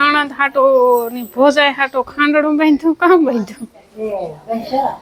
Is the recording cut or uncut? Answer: uncut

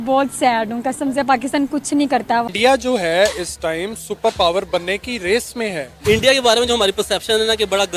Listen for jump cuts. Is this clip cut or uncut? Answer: cut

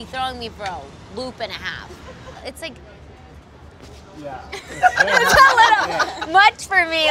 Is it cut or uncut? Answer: cut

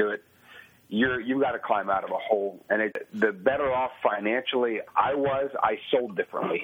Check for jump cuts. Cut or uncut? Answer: cut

